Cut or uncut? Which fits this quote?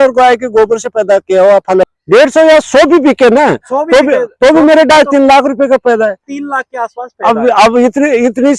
cut